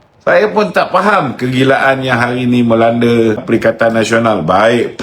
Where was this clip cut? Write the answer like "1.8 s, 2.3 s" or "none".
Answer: 3.4 s